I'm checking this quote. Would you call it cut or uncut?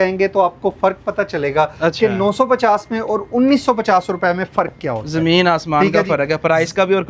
uncut